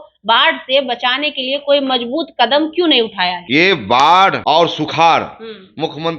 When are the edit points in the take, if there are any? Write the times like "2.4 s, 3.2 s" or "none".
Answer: 3.3 s, 4.4 s